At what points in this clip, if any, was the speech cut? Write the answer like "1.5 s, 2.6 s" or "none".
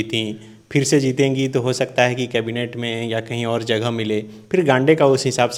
none